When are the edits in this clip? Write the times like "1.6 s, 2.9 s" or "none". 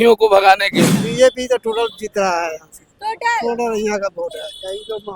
1.0 s